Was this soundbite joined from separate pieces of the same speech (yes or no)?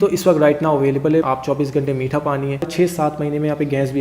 yes